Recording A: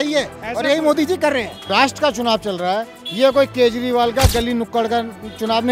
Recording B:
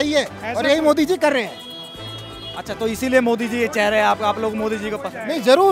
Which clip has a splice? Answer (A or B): A